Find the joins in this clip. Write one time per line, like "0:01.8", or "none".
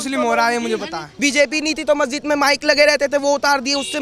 0:01.1